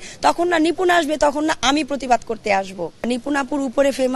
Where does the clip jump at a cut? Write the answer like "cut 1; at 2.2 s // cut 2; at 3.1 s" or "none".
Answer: cut 1; at 3.1 s